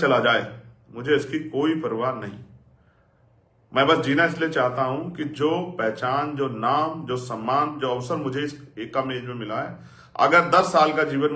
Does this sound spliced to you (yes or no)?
no